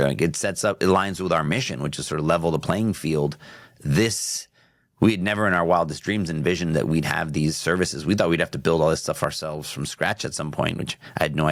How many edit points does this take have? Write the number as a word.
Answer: zero